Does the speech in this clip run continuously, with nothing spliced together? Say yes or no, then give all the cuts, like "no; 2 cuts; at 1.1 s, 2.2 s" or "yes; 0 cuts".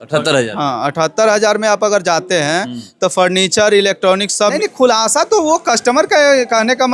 no; 1 cut; at 4.6 s